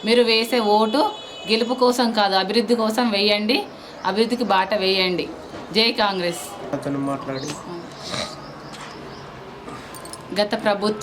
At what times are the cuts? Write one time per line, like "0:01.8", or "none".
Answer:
none